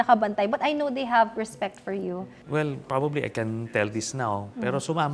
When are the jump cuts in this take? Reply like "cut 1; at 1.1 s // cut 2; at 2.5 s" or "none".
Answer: cut 1; at 2.3 s

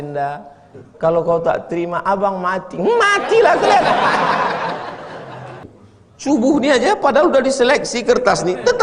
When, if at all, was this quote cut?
cut 1; at 5.6 s

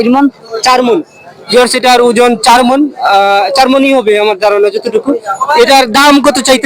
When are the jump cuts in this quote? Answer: none

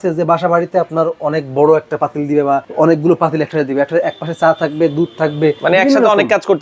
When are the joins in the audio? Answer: cut 1; at 2.7 s // cut 2; at 5.6 s

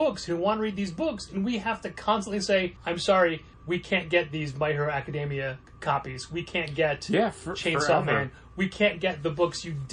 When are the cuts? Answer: cut 1; at 2.8 s // cut 2; at 3.5 s // cut 3; at 5.7 s

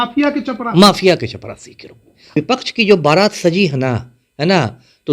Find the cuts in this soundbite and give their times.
cut 1; at 2.3 s

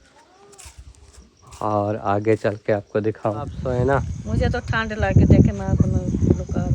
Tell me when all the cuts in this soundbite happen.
cut 1; at 3.6 s

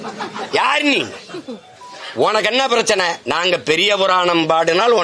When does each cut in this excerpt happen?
none

